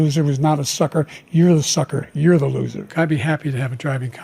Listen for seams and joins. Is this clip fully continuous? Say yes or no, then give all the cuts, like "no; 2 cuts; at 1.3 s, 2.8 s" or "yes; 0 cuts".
no; 1 cut; at 2.9 s